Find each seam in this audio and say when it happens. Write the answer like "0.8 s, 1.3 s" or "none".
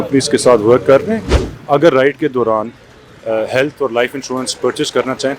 1.5 s